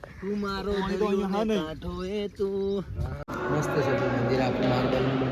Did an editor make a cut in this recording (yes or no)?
yes